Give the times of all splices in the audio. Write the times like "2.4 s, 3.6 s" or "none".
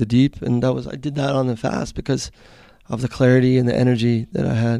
none